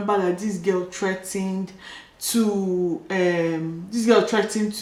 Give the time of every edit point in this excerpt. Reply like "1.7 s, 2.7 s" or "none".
none